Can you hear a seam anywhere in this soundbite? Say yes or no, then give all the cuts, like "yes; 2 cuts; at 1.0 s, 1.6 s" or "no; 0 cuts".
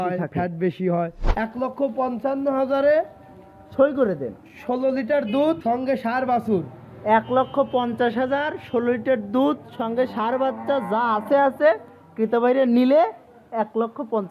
yes; 2 cuts; at 1.2 s, 5.6 s